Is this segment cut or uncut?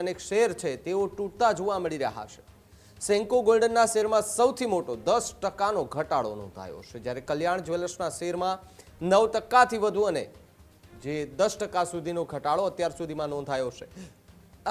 uncut